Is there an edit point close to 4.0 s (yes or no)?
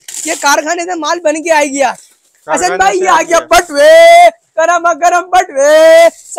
no